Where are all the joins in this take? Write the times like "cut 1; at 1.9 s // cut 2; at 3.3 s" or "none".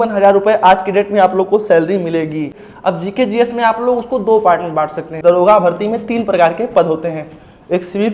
cut 1; at 2.6 s // cut 2; at 5.1 s